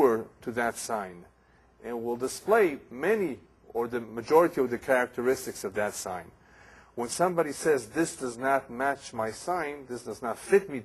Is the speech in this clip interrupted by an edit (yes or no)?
yes